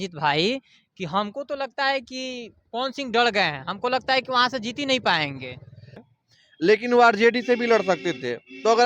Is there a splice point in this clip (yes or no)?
yes